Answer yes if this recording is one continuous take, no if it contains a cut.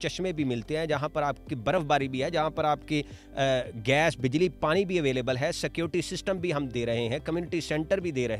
yes